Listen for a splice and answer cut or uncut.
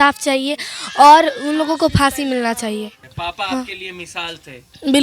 cut